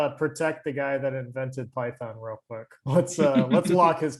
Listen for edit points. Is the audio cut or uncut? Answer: uncut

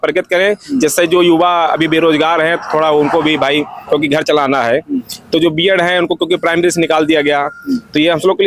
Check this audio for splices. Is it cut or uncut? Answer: uncut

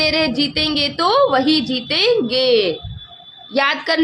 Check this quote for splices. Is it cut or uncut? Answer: uncut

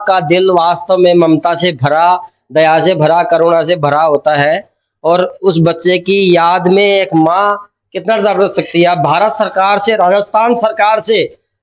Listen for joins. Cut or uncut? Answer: uncut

